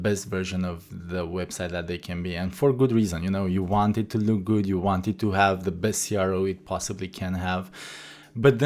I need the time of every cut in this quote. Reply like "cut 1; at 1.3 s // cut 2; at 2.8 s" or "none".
none